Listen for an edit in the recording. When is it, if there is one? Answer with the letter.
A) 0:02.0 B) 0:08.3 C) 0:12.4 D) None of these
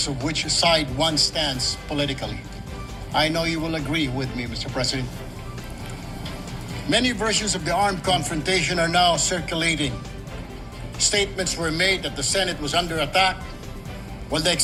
D